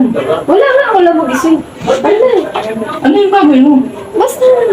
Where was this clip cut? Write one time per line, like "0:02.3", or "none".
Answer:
none